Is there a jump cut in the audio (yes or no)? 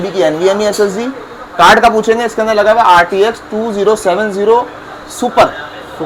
no